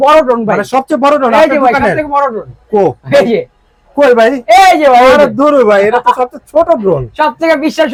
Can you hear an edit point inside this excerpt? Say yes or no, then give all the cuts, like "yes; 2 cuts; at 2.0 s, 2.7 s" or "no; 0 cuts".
no; 0 cuts